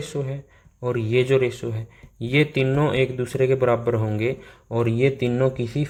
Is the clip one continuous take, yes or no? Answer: yes